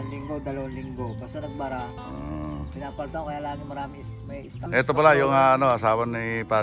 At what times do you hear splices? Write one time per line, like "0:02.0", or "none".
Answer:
0:04.5